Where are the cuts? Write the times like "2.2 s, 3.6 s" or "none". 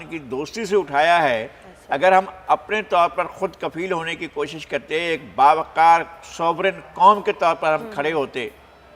none